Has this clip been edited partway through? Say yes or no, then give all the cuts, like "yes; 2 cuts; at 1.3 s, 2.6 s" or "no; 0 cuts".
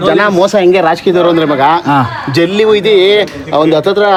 no; 0 cuts